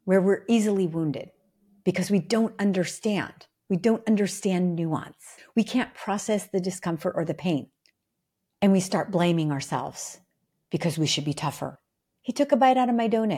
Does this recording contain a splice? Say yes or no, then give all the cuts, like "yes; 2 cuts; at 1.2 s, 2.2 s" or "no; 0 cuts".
yes; 2 cuts; at 5.4 s, 11.8 s